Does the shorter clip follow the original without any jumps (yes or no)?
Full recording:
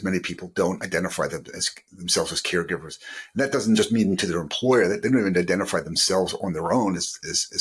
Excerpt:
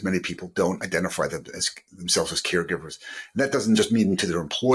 yes